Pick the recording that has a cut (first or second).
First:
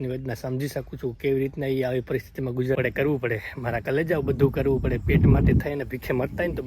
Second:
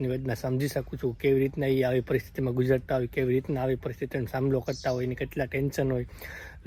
first